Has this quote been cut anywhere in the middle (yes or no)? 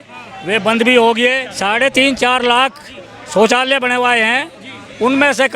yes